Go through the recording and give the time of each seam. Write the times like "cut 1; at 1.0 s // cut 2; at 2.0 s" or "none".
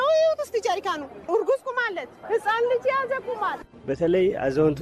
cut 1; at 1.3 s